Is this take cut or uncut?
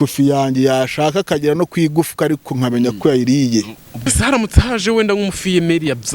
cut